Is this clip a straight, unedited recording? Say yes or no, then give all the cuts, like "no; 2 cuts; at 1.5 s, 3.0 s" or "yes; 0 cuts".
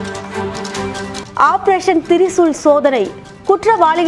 yes; 0 cuts